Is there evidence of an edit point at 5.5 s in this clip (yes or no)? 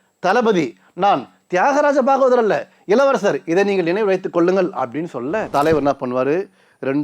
yes